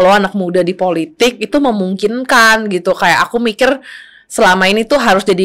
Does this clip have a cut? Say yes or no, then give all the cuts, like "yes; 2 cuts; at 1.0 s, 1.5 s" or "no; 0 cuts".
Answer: no; 0 cuts